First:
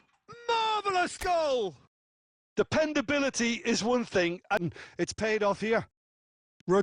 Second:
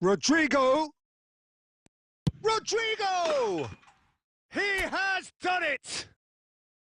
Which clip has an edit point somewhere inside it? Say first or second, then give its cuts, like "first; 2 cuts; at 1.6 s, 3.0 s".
first; 1 cut; at 4.6 s